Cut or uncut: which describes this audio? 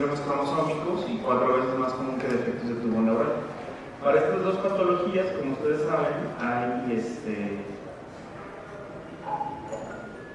uncut